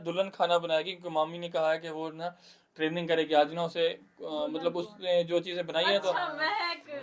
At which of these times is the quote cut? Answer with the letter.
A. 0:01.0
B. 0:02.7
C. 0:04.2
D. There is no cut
D